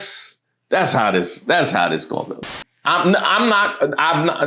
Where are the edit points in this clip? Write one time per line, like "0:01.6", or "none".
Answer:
0:02.3